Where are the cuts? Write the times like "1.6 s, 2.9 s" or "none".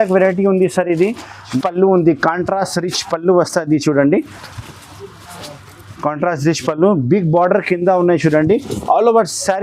1.5 s